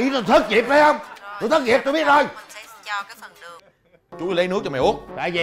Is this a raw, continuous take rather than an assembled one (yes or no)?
no